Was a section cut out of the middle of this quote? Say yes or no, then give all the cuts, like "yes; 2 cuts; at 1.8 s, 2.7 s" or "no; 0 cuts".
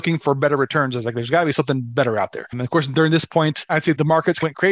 no; 0 cuts